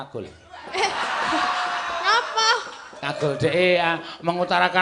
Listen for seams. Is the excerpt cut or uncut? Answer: uncut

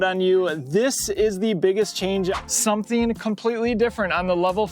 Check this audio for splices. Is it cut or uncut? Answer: cut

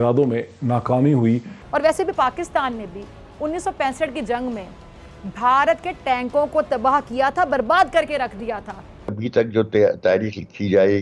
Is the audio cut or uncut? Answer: cut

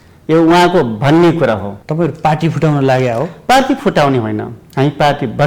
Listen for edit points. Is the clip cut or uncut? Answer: cut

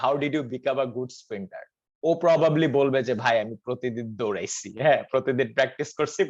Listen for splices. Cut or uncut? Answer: uncut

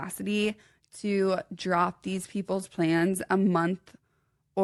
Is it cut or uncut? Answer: uncut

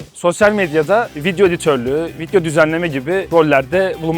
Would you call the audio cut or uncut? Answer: cut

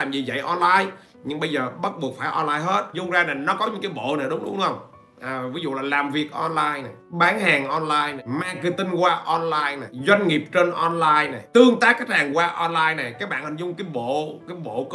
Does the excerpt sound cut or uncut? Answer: cut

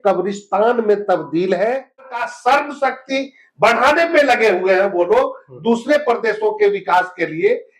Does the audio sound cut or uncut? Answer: cut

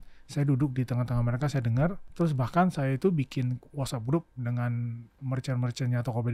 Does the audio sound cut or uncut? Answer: cut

